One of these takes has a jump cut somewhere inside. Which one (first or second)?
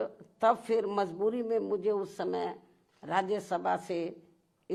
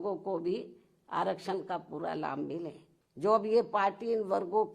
second